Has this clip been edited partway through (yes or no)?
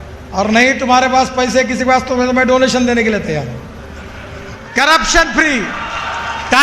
yes